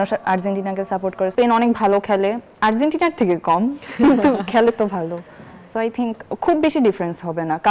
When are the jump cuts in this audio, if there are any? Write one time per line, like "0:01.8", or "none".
0:01.3
0:02.5

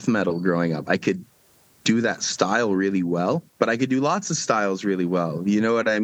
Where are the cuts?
0:03.5

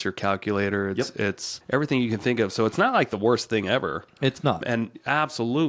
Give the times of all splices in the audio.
0:01.5
0:04.6

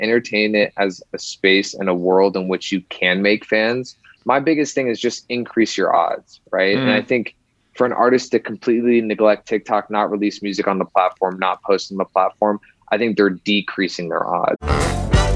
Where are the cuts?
0:04.1
0:14.6

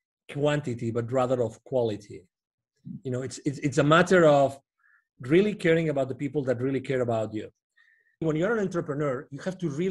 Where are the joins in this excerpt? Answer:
0:08.2

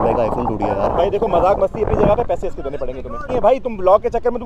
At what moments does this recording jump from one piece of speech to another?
0:03.2

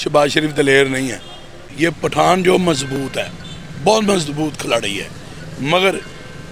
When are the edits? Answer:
0:01.6

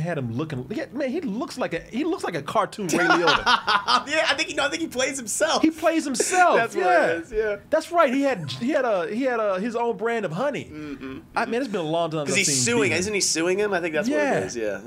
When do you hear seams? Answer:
none

